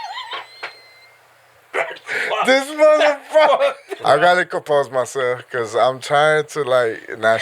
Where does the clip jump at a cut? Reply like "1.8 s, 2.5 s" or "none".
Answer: 4.0 s

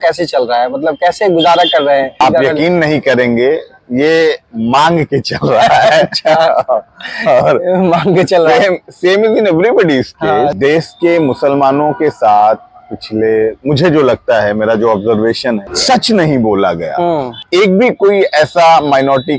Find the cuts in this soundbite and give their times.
2.2 s, 10.6 s, 15.7 s, 17.4 s

